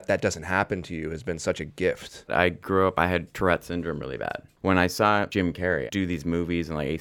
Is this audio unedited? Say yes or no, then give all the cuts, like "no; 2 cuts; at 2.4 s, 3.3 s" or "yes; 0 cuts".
no; 3 cuts; at 2.3 s, 4.4 s, 5.8 s